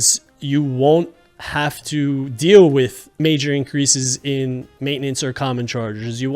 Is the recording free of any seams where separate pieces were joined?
no; 1 cut; at 3.1 s

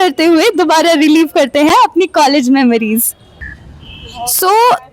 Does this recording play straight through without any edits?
yes; 0 cuts

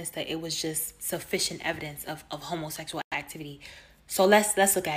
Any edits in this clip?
no; 0 cuts

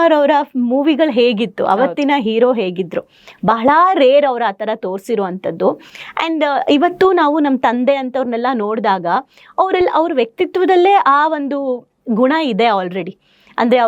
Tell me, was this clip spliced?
no; 0 cuts

